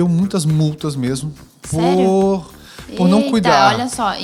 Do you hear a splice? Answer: no; 0 cuts

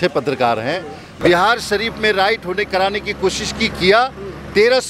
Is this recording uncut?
no; 1 cut; at 1.1 s

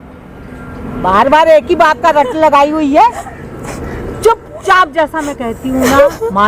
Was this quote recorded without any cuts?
yes; 0 cuts

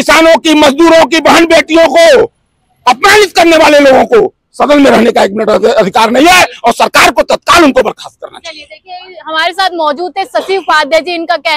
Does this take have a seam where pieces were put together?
no; 0 cuts

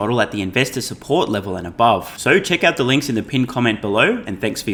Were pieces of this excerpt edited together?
no; 0 cuts

